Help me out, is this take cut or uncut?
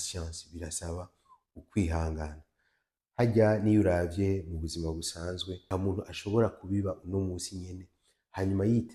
cut